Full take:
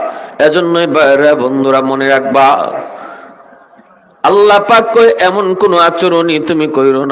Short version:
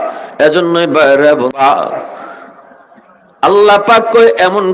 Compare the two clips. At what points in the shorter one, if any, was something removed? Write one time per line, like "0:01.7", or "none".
0:01.6